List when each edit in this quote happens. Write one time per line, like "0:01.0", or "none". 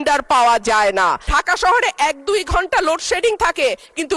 0:01.3